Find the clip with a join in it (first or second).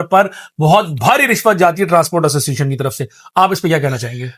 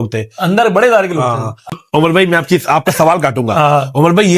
second